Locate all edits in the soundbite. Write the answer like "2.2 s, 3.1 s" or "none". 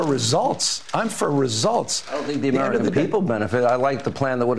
none